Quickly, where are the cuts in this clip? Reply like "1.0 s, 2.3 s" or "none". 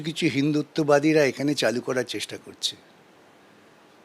none

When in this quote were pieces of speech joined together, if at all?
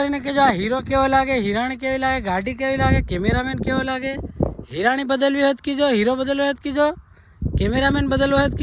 none

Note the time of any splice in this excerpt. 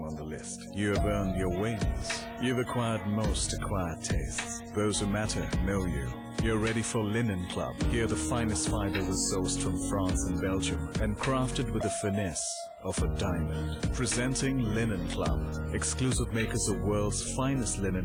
none

